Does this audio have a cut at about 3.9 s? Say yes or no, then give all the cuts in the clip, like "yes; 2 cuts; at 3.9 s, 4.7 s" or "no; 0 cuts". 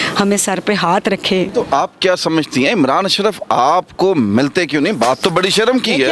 no; 1 cut; at 1.5 s